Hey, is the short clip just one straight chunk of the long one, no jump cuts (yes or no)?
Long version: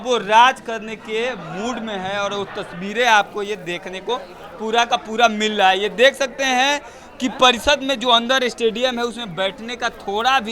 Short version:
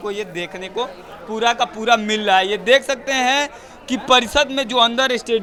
yes